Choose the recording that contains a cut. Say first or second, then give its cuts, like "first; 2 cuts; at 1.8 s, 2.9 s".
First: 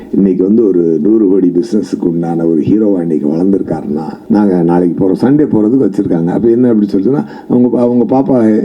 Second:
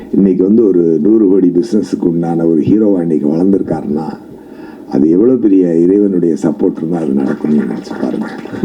first; 1 cut; at 4.1 s